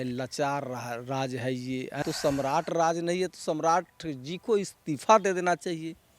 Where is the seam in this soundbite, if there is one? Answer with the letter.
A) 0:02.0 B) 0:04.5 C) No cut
A